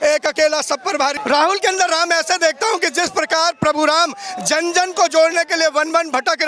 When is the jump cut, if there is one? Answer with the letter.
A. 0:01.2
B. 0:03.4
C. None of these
A